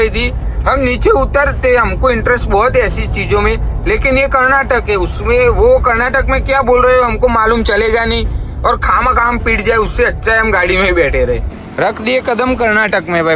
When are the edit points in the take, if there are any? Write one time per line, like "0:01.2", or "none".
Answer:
0:11.6